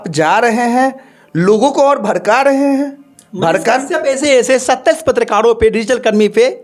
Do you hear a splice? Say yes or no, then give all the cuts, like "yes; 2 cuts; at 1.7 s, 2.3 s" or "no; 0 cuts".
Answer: no; 0 cuts